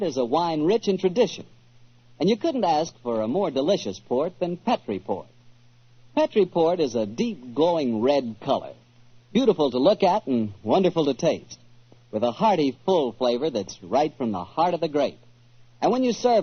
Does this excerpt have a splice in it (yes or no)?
no